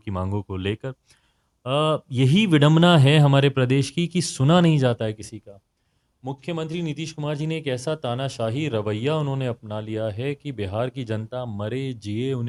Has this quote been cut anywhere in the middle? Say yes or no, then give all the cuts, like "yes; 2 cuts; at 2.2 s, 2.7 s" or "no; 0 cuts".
no; 0 cuts